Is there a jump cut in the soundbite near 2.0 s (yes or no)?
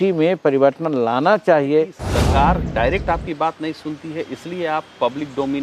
yes